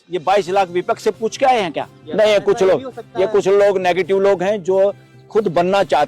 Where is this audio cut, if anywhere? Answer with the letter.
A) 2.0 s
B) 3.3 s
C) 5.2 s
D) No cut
A